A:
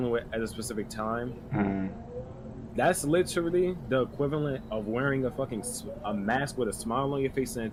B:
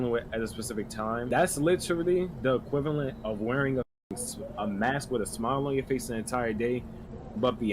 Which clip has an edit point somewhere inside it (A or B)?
B